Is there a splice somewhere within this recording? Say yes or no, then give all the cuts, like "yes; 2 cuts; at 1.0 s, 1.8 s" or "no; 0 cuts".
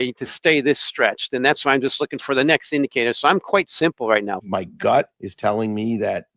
yes; 1 cut; at 4.9 s